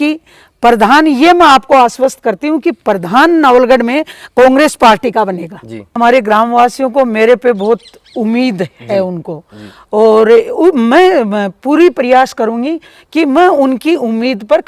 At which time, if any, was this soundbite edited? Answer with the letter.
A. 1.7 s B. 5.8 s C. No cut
B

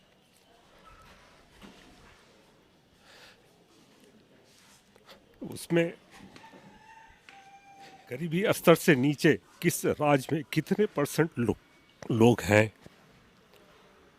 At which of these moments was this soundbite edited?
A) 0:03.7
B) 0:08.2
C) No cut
B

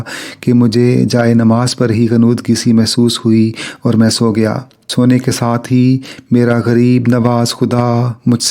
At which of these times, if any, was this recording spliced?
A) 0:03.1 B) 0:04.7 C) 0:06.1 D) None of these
B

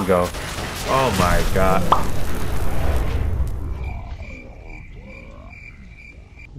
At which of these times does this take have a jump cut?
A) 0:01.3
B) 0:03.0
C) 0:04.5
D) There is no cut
D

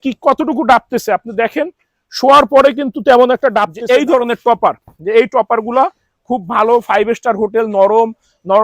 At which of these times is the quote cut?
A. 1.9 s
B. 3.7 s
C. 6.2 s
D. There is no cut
B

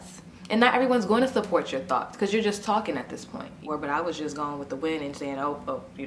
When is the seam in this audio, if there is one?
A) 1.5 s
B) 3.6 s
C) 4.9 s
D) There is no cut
B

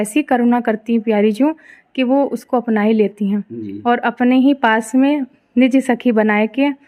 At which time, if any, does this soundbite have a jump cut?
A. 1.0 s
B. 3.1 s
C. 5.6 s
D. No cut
D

